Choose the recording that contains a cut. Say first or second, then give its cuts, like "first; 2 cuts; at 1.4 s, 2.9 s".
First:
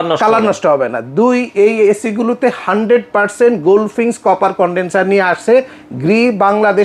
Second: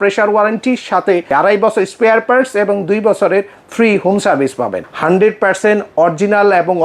second; 2 cuts; at 1.3 s, 4.8 s